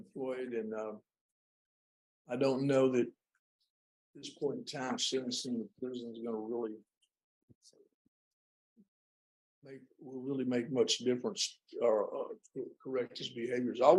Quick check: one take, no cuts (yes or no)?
yes